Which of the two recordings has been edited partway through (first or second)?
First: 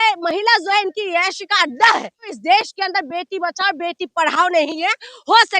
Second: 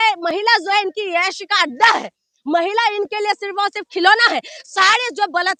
first